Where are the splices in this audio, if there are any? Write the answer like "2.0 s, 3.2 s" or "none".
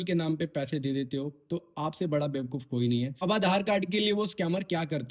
3.2 s